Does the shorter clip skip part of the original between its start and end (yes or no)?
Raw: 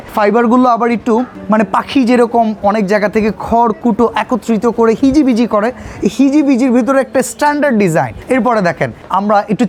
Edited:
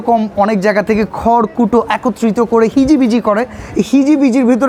no